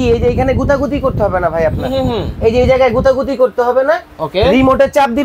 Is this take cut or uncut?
uncut